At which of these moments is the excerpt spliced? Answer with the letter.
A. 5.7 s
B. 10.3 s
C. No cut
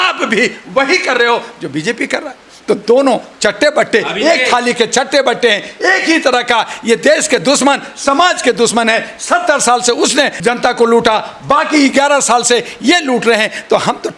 B